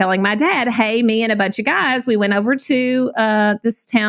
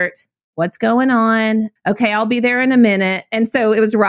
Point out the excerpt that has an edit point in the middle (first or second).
second